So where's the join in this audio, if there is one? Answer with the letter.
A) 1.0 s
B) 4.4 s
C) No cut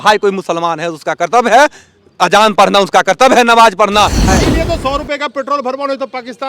B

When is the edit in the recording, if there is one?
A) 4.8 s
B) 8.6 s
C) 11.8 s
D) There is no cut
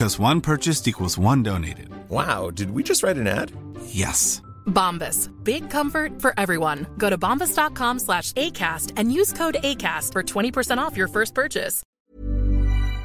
C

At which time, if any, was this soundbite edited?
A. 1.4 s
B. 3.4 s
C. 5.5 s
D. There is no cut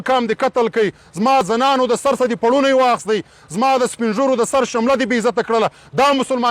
A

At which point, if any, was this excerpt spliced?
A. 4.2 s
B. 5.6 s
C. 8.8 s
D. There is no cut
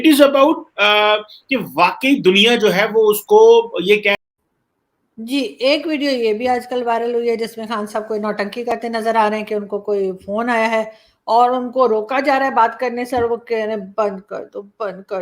A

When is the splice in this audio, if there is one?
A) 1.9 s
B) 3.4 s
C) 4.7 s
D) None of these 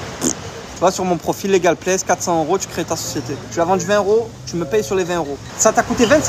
B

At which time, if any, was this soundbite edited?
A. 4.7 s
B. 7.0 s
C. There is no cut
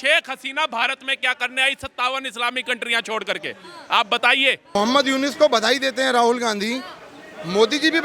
A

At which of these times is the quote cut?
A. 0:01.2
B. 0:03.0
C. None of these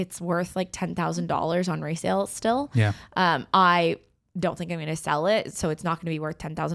C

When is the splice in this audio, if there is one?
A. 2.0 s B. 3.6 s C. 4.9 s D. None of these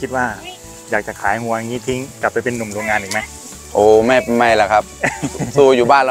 D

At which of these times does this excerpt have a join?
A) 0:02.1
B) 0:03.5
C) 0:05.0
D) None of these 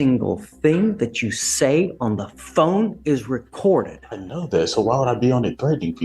D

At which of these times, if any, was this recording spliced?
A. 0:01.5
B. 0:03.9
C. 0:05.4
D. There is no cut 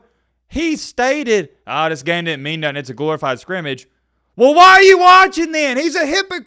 D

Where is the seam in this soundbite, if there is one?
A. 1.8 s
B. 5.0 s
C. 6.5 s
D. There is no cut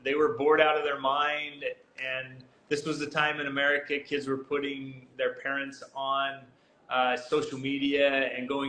D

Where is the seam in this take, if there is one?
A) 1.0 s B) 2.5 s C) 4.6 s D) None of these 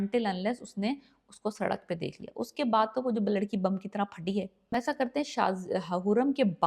C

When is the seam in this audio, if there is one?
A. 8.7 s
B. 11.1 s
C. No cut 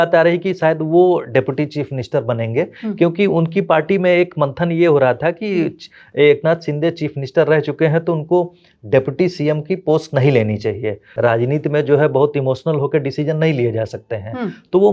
B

